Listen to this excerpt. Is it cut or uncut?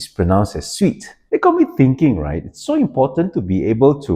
cut